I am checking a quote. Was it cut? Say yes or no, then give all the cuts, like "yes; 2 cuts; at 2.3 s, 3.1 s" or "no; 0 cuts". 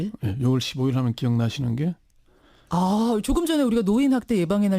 yes; 1 cut; at 1.0 s